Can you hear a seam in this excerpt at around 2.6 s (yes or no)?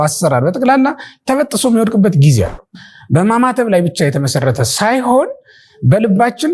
yes